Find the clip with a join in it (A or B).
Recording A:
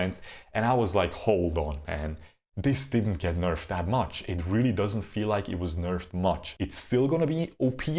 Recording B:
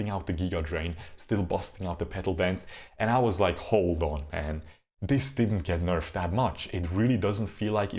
A